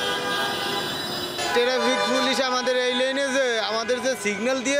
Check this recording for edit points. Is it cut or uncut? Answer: cut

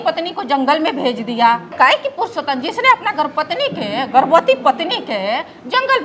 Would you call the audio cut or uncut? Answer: uncut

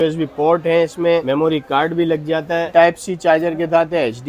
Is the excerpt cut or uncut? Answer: cut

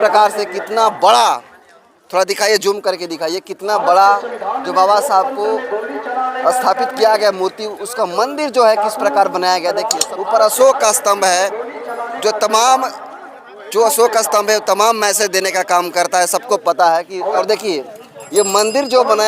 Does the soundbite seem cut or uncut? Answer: cut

